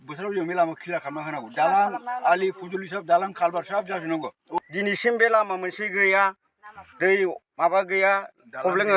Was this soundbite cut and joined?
yes; 1 cut; at 4.6 s

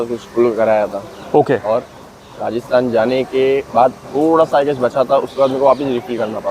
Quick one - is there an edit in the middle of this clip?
no; 0 cuts

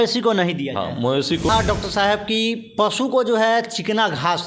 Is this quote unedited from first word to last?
no; 1 cut; at 1.5 s

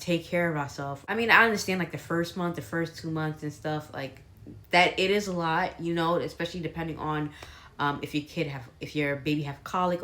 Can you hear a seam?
yes; 2 cuts; at 1.0 s, 3.1 s

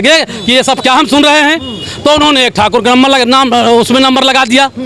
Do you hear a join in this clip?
no; 0 cuts

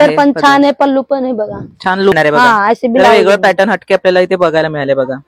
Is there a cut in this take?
yes; 1 cut; at 2.1 s

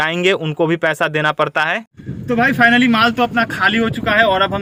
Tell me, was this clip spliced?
no; 0 cuts

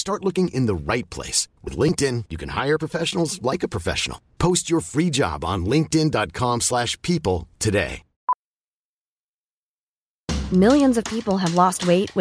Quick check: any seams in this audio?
yes; 1 cut; at 8.1 s

